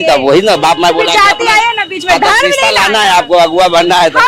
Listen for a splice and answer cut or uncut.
uncut